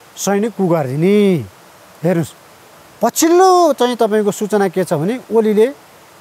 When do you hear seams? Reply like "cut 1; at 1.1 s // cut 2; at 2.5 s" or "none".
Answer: none

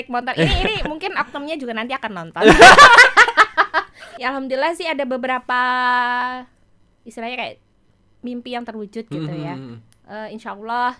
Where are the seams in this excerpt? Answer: cut 1; at 4.0 s

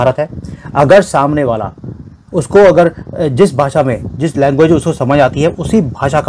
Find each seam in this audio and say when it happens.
none

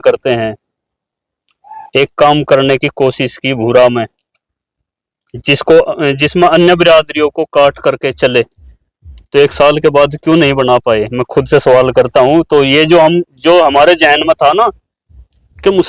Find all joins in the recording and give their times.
none

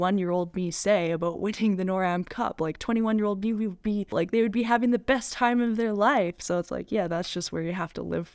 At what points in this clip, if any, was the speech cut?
cut 1; at 4.1 s

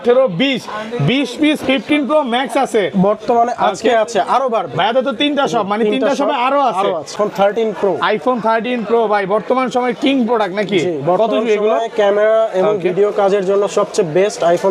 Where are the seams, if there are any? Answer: cut 1; at 7.1 s

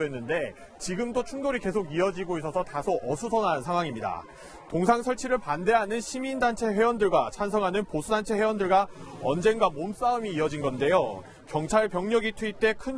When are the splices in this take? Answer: cut 1; at 8.3 s

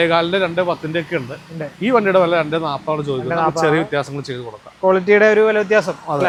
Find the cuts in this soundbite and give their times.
none

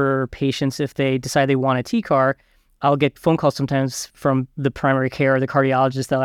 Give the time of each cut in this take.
cut 1; at 2.8 s // cut 2; at 4.5 s

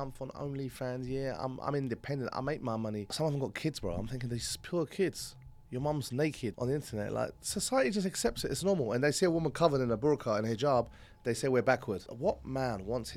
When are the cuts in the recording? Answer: cut 1; at 3.1 s // cut 2; at 6.5 s // cut 3; at 12.1 s

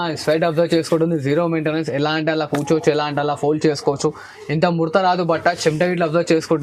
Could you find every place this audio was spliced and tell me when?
none

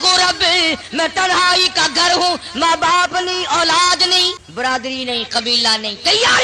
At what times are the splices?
cut 1; at 4.4 s

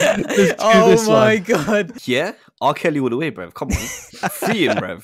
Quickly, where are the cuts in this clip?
cut 1; at 1.9 s // cut 2; at 4.2 s

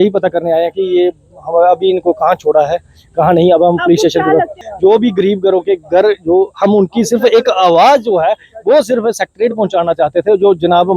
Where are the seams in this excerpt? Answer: cut 1; at 4.7 s

